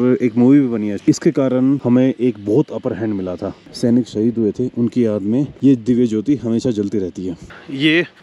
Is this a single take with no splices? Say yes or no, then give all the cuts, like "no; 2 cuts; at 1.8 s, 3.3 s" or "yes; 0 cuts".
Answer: no; 2 cuts; at 0.9 s, 3.6 s